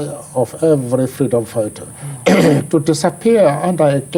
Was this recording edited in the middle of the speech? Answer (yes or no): no